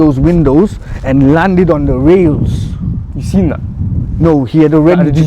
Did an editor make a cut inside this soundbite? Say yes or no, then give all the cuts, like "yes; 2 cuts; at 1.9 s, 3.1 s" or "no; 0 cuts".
no; 0 cuts